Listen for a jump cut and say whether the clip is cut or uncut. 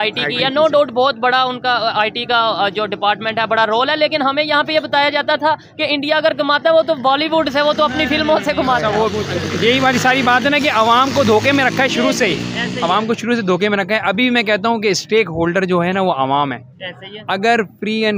uncut